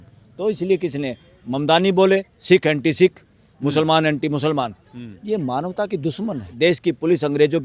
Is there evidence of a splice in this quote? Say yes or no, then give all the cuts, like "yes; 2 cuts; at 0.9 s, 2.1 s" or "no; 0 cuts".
yes; 2 cuts; at 2.3 s, 6.5 s